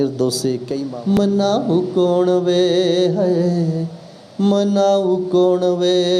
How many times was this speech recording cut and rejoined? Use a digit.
1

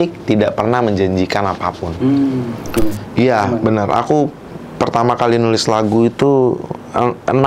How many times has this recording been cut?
1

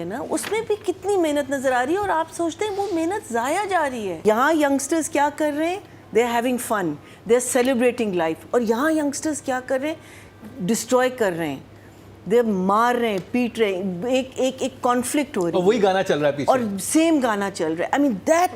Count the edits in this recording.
1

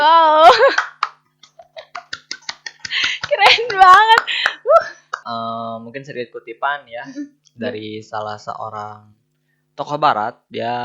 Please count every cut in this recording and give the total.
1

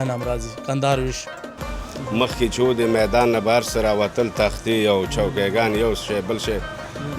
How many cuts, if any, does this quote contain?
1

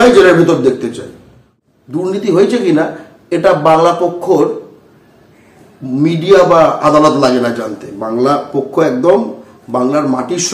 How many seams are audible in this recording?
1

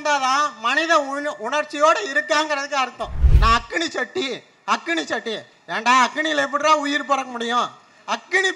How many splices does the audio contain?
1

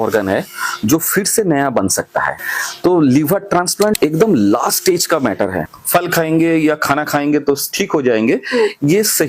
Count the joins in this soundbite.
2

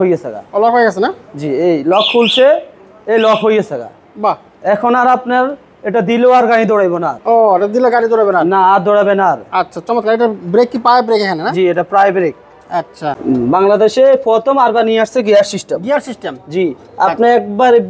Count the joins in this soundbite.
0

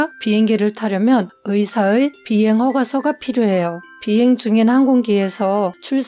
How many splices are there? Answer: 0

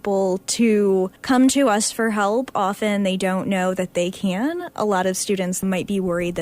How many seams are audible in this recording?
2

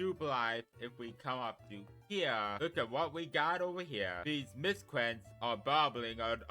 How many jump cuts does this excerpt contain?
2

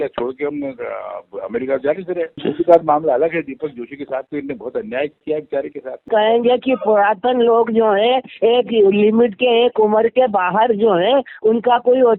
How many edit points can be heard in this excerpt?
1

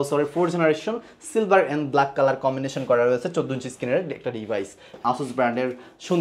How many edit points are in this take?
1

